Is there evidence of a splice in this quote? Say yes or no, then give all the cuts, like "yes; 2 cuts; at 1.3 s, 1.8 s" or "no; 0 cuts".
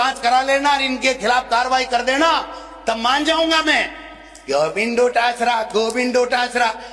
no; 0 cuts